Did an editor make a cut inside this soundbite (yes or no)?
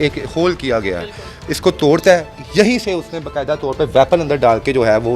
yes